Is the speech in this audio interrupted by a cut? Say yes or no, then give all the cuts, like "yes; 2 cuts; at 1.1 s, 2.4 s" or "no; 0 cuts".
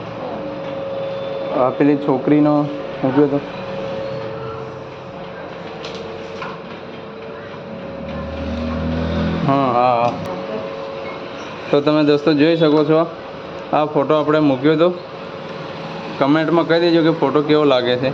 yes; 1 cut; at 10.2 s